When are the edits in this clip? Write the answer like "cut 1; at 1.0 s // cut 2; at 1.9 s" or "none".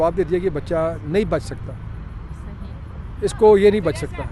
none